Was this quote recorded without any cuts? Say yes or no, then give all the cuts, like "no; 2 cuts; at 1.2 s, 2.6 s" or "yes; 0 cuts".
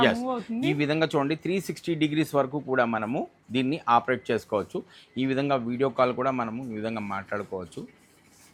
yes; 0 cuts